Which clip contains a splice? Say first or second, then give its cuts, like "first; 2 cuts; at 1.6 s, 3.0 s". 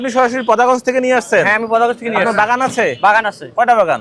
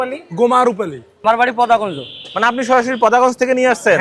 second; 1 cut; at 1.1 s